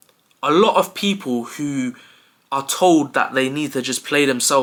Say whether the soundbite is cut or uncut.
uncut